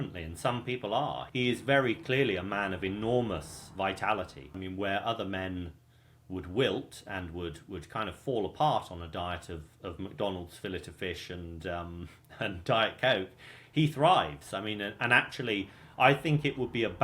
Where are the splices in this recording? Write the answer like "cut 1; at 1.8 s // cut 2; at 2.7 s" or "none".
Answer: cut 1; at 1.2 s // cut 2; at 3.6 s // cut 3; at 4.5 s